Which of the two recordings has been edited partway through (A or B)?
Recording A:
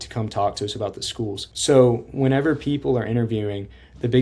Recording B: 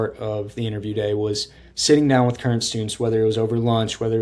A